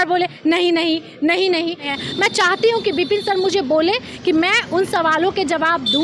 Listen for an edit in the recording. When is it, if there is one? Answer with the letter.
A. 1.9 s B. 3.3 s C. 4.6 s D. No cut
A